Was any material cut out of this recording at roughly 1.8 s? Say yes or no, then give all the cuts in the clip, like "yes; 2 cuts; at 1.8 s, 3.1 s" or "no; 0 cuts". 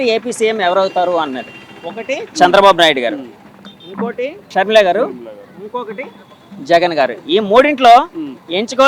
no; 1 cut; at 4.5 s